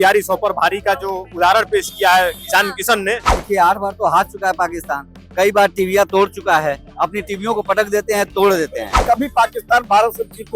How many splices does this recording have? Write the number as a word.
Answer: two